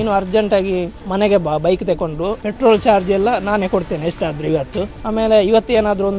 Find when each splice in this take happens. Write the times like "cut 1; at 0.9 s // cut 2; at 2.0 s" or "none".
cut 1; at 1.0 s // cut 2; at 2.4 s // cut 3; at 5.0 s